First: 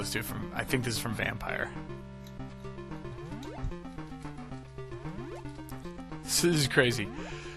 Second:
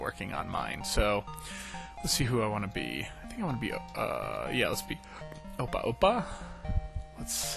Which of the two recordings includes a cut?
first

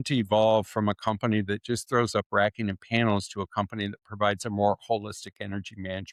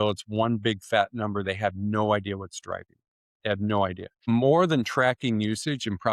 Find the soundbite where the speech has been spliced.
second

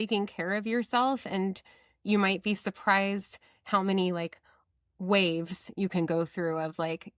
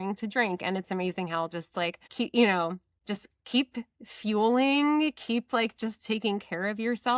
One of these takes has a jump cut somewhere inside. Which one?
second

